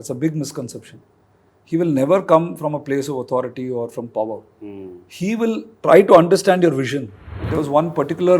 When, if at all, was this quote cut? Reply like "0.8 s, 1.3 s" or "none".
7.4 s